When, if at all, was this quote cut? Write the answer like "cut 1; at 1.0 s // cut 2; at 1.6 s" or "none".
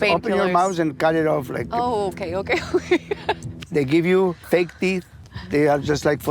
cut 1; at 3.5 s // cut 2; at 4.7 s